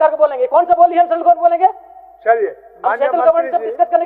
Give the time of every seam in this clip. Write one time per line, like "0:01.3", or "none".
none

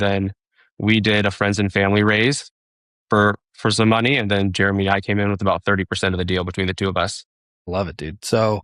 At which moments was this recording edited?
none

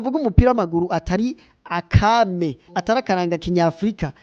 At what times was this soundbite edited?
0:02.7

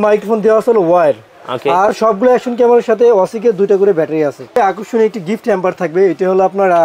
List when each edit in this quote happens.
0:04.6

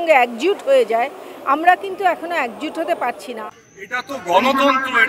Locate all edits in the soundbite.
0:03.5

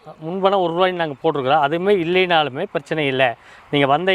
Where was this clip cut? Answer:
none

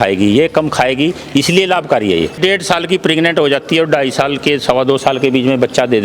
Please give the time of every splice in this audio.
0:02.3

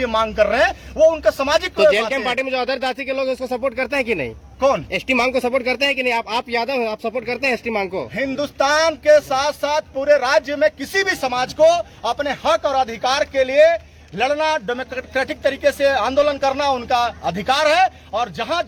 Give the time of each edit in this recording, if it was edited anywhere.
none

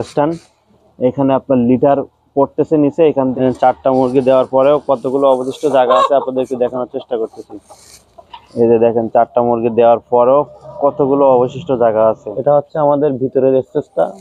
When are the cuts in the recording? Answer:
0:03.3
0:12.3

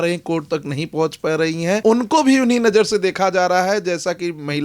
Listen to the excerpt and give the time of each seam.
0:01.8

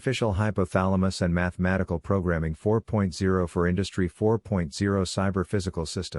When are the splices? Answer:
0:02.5

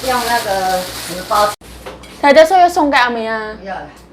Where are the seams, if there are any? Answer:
0:01.7

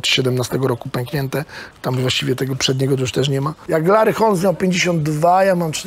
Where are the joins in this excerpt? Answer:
0:03.5

